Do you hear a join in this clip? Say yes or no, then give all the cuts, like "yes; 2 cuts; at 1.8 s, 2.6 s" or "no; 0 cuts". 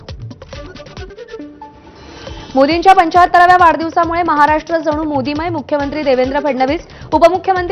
yes; 1 cut; at 1.1 s